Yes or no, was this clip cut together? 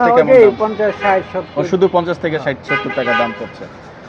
no